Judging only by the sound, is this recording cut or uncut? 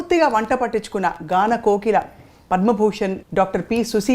cut